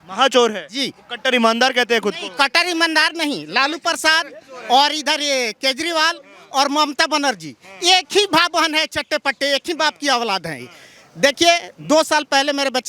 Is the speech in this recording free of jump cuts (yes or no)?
yes